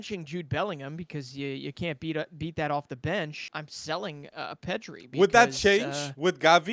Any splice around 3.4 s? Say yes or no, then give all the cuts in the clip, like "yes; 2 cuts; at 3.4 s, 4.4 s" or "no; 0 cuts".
yes; 1 cut; at 3.4 s